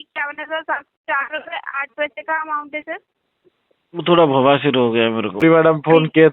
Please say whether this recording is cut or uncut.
cut